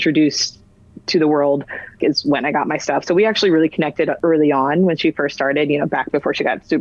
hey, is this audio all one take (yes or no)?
no